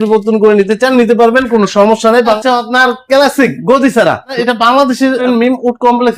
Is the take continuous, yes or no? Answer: no